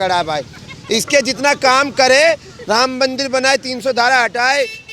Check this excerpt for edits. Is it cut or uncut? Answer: uncut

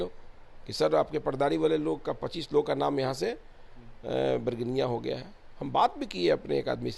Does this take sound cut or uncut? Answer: uncut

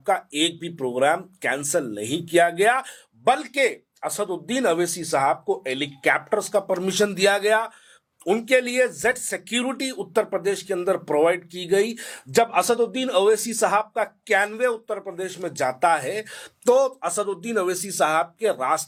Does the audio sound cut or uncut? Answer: uncut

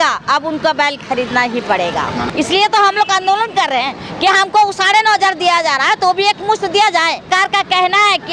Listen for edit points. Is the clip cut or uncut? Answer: cut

